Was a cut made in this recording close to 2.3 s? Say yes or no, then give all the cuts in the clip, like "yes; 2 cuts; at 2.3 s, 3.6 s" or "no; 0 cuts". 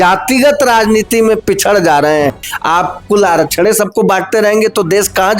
yes; 1 cut; at 2.3 s